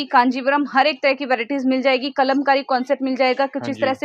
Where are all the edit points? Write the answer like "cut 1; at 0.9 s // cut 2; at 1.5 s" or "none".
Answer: none